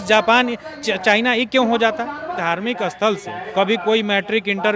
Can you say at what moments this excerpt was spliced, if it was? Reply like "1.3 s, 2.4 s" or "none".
2.4 s, 3.4 s